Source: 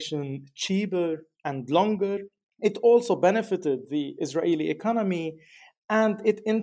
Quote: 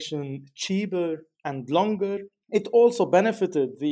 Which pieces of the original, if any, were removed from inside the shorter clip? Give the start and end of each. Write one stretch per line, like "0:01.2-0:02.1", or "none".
0:02.3-0:02.4